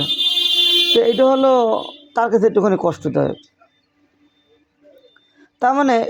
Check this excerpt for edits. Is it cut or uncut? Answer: uncut